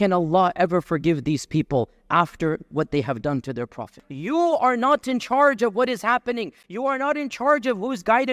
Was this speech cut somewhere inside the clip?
yes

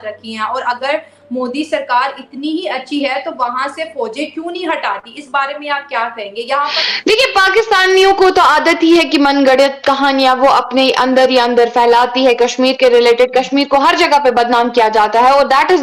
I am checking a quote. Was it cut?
no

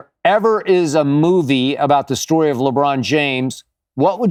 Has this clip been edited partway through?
no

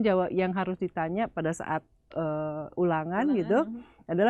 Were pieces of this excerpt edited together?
no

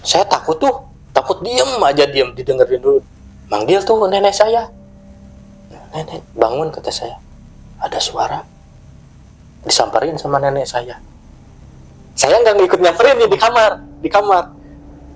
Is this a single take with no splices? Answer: no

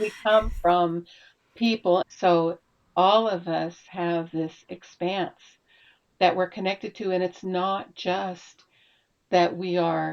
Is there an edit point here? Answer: yes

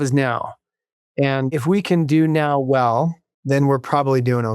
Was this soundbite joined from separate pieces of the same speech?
yes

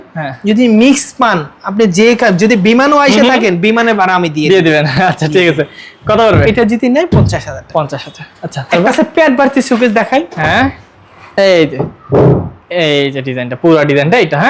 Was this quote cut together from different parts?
no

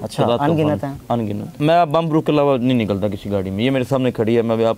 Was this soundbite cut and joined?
yes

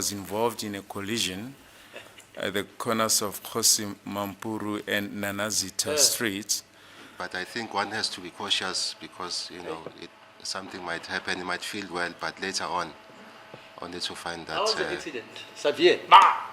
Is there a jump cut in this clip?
yes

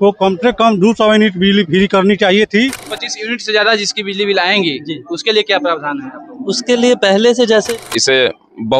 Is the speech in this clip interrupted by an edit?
yes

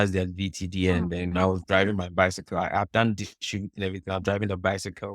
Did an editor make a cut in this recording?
no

